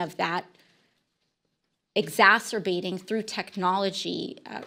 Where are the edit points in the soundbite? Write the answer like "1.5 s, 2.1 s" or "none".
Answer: none